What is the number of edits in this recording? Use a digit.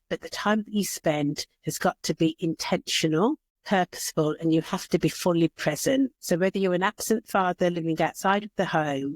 2